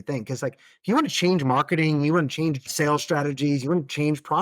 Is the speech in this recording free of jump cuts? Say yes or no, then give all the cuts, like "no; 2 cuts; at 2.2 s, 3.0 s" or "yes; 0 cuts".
no; 1 cut; at 2.7 s